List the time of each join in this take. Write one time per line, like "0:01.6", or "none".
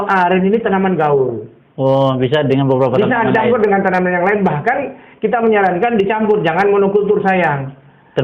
none

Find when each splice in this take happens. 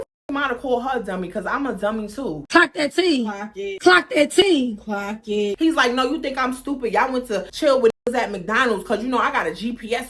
0:05.5
0:07.5

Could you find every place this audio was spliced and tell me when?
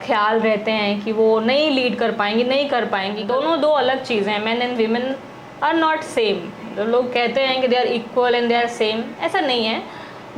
0:03.2

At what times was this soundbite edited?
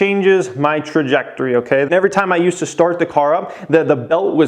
0:01.9

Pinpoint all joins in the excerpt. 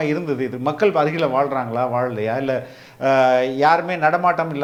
none

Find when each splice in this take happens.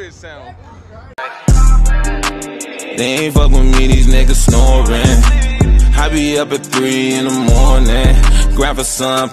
0:01.1

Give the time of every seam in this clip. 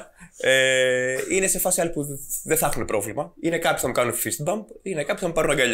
0:03.3

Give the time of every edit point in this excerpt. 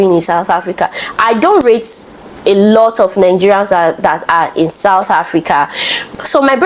none

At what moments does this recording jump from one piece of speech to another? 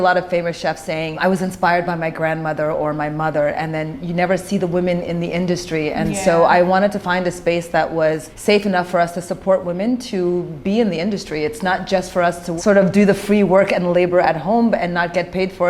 0:01.2
0:08.3
0:12.5

